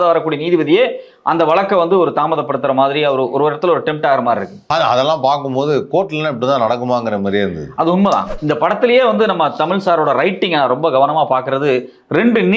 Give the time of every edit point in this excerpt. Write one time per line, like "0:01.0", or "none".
0:04.6
0:08.3